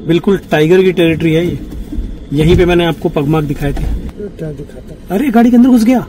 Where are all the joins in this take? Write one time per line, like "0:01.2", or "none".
0:04.1